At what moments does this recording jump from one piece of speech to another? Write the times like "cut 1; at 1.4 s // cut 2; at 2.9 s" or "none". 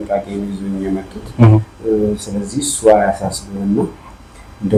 none